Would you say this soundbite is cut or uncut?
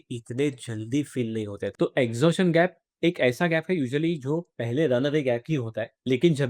cut